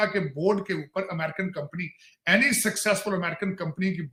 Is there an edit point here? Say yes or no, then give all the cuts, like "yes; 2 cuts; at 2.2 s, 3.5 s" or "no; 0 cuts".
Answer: no; 0 cuts